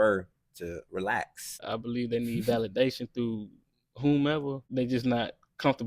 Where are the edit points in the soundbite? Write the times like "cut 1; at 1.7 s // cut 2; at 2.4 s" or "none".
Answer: cut 1; at 1.6 s // cut 2; at 4.6 s